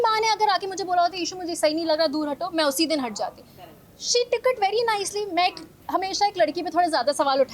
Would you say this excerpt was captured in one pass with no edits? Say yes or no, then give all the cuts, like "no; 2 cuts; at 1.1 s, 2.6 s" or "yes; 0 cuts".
yes; 0 cuts